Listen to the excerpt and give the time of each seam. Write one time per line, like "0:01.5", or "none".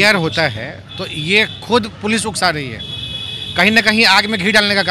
none